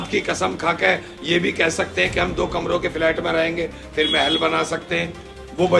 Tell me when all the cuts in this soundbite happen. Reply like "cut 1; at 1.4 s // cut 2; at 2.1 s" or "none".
none